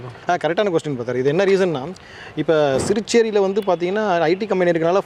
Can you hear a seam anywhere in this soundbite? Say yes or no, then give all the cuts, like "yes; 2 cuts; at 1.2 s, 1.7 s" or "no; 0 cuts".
no; 0 cuts